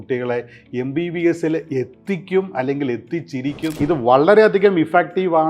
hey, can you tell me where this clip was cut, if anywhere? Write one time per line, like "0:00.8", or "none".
0:03.8